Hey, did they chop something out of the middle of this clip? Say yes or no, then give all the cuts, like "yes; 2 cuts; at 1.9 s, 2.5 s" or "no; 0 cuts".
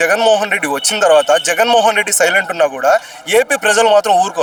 no; 0 cuts